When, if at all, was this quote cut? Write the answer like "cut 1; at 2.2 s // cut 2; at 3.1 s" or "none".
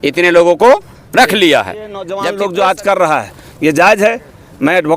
cut 1; at 2.1 s